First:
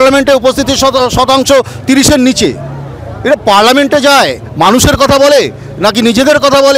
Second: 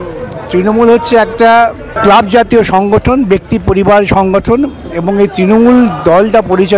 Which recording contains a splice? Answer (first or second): second